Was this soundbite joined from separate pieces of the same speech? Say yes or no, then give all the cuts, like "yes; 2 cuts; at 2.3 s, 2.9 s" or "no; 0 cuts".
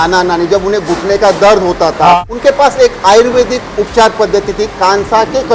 yes; 1 cut; at 2.2 s